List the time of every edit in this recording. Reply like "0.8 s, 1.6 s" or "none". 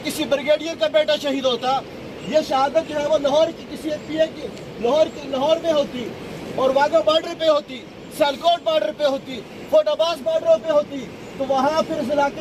none